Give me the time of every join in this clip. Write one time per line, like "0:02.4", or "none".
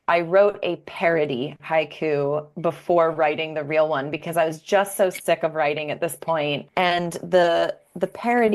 0:06.6